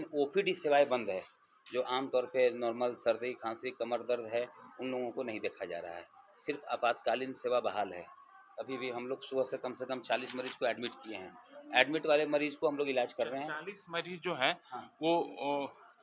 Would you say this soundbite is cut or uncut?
uncut